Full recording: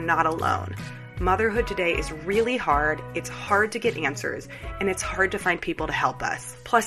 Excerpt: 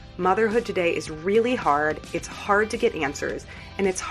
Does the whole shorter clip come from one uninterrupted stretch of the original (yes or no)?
yes